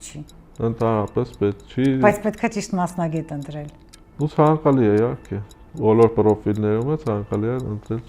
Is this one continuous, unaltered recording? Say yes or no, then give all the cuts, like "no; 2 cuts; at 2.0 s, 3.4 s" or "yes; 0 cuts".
yes; 0 cuts